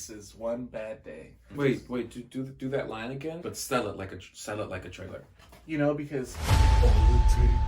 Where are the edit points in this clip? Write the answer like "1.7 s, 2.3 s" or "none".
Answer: 1.5 s, 3.4 s